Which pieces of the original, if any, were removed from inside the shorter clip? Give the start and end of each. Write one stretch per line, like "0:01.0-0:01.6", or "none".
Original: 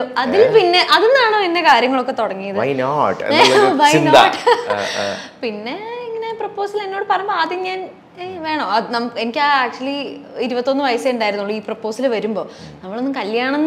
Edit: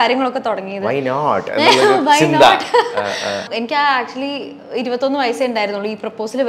0:05.2-0:09.1